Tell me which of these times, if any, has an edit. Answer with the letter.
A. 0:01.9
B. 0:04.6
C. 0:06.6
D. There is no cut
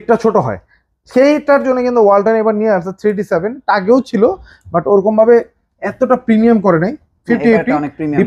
D